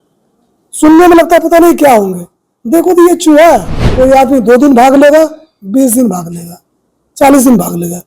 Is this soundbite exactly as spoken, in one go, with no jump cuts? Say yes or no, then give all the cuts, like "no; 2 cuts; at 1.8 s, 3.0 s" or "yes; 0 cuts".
no; 1 cut; at 3.8 s